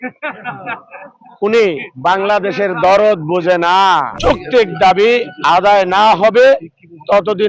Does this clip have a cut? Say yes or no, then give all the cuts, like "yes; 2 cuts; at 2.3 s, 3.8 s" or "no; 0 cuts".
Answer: yes; 1 cut; at 4.1 s